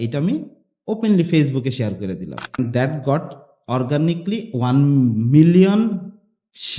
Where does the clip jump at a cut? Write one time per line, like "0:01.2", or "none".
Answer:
0:02.6